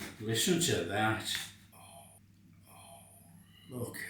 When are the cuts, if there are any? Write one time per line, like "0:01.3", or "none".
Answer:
0:02.1